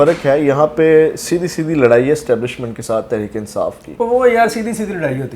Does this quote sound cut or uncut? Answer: uncut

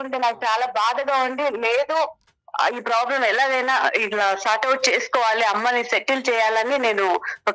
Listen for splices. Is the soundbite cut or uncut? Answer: uncut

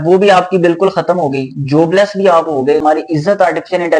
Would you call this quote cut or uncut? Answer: cut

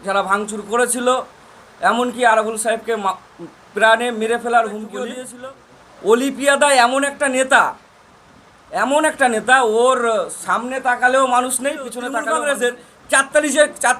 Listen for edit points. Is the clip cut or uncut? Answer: cut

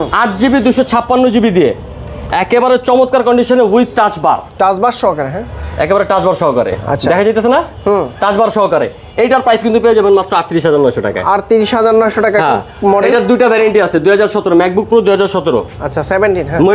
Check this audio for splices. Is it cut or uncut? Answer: uncut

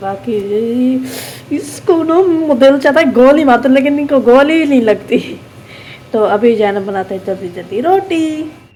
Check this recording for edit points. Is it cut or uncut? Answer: uncut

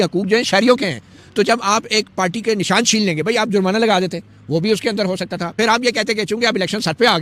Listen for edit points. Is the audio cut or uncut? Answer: uncut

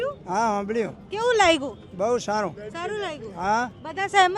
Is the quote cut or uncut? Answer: uncut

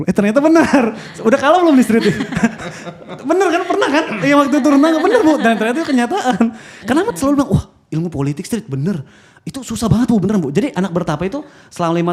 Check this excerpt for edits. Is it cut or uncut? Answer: uncut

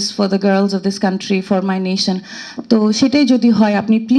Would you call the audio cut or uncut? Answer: uncut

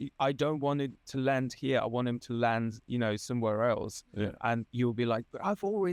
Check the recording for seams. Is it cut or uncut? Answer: uncut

